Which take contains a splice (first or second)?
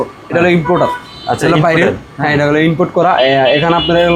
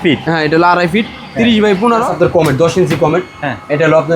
second